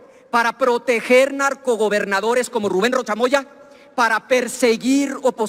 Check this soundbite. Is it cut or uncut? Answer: uncut